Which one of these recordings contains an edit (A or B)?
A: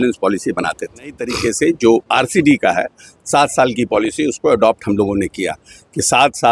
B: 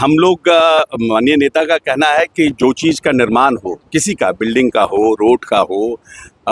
A